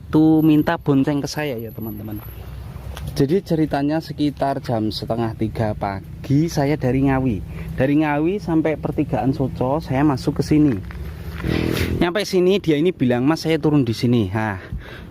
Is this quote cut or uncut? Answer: cut